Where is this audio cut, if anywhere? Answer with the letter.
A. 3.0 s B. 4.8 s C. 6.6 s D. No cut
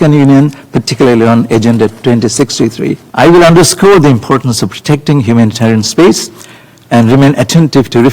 A